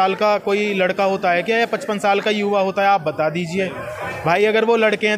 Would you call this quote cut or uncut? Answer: uncut